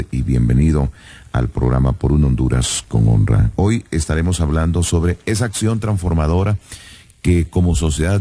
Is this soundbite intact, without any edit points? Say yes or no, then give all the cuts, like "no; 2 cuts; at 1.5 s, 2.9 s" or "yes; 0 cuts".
no; 1 cut; at 5.5 s